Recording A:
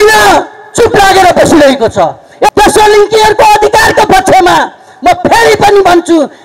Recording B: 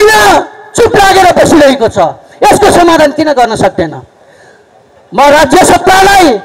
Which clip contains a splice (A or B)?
A